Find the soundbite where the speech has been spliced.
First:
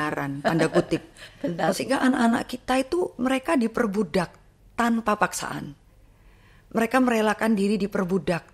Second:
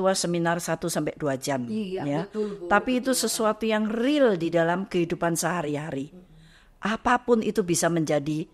first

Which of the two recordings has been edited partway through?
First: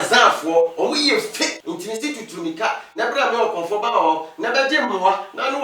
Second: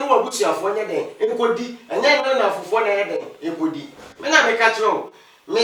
first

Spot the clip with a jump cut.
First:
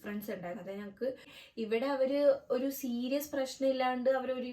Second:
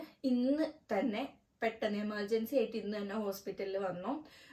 first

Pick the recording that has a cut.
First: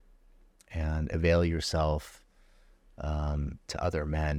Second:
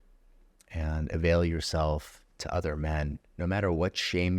second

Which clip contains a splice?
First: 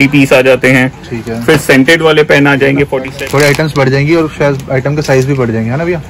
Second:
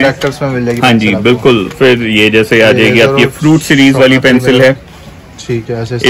first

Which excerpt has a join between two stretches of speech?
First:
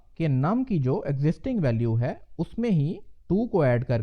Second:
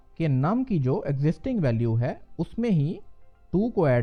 first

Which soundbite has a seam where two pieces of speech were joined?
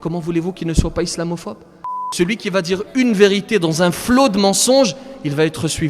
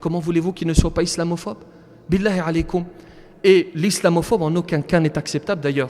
first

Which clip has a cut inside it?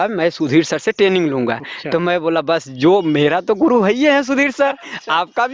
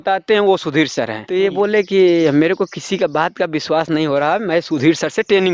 second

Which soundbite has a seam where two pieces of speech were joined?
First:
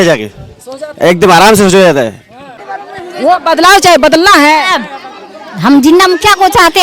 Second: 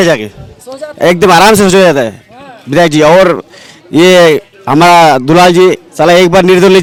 first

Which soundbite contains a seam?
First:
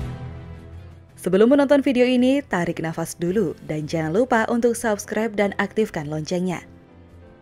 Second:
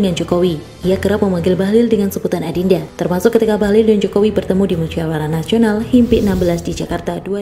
second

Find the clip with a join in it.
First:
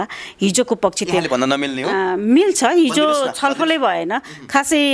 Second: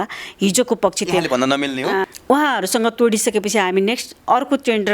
second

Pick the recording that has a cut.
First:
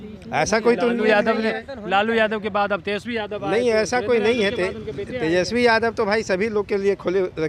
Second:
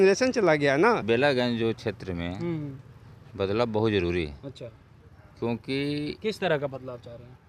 second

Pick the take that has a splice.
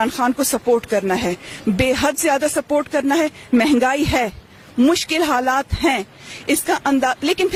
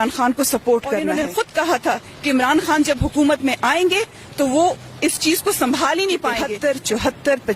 second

